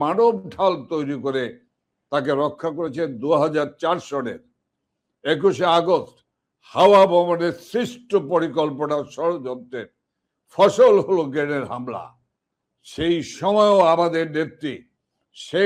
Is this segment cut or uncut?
uncut